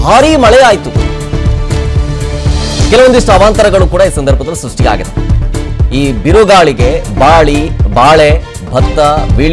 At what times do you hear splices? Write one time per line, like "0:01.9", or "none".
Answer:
none